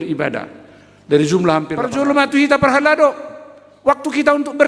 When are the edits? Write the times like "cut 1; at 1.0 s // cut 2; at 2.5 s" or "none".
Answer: cut 1; at 1.9 s